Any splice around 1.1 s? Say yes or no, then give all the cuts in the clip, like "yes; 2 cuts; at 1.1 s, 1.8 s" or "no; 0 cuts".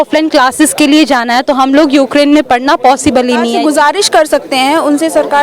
no; 1 cut; at 3.5 s